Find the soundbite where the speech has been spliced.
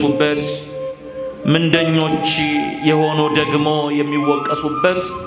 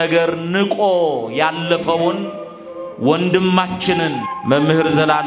second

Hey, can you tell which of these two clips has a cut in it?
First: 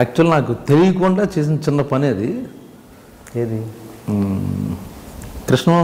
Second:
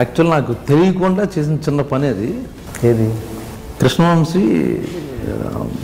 second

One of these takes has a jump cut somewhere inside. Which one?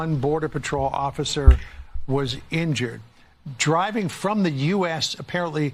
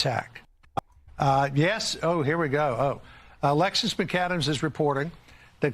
second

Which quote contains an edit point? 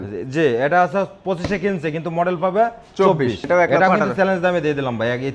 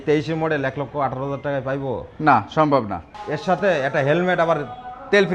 first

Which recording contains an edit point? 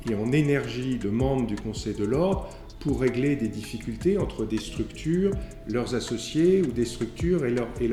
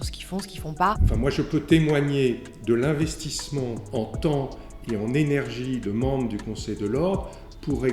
second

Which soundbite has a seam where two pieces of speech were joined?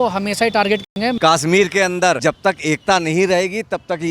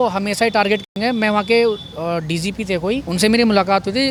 first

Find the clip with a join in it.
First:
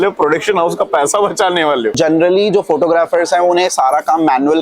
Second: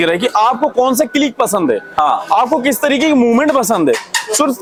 first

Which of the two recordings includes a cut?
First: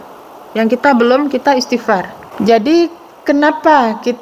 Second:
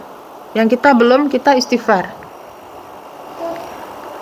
first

